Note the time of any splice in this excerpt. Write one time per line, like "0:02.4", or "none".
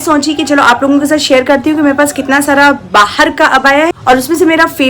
0:04.0